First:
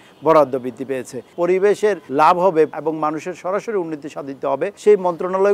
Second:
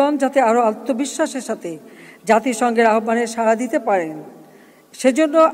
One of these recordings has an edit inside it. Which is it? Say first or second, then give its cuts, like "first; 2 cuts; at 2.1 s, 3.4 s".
first; 4 cuts; at 1.3 s, 2.0 s, 2.7 s, 4.8 s